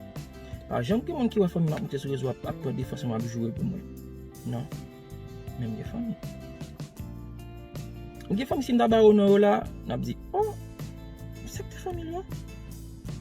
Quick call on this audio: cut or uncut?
cut